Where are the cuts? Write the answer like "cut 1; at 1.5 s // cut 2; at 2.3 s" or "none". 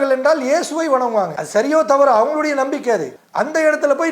cut 1; at 1.4 s // cut 2; at 3.2 s